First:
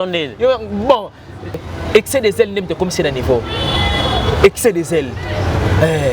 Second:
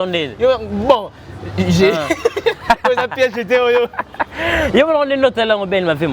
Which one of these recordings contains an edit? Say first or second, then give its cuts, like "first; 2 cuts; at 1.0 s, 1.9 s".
first; 1 cut; at 1.6 s